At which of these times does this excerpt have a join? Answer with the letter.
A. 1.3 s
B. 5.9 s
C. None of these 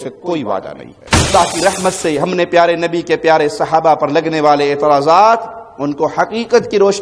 A